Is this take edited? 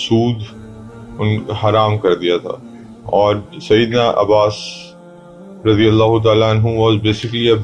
no; 0 cuts

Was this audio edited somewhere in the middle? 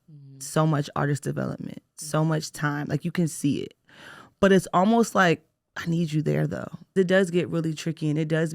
yes; 1 cut; at 6.9 s

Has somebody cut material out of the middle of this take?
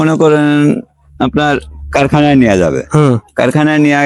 no; 0 cuts

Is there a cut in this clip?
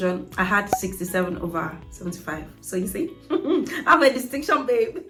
no; 0 cuts

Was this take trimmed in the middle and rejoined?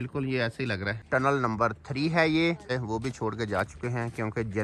yes; 2 cuts; at 1.0 s, 2.7 s

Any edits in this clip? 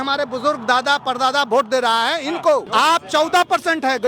yes; 1 cut; at 2.7 s

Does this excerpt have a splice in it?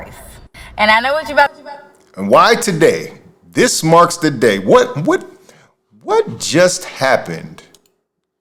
no; 0 cuts

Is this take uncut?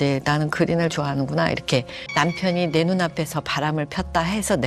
no; 1 cut; at 2.0 s

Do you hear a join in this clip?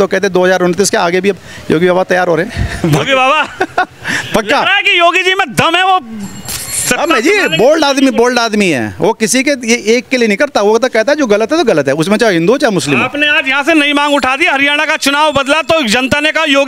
no; 0 cuts

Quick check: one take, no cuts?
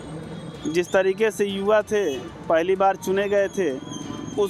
yes; 0 cuts

